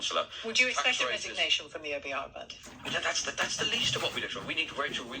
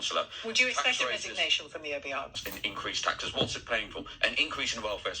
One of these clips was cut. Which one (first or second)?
second